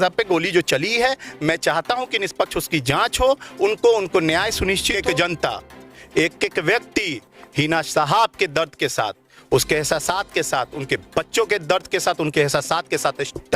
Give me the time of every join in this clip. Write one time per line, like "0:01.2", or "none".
0:04.9